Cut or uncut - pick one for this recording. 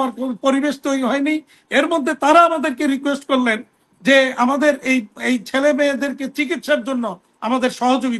uncut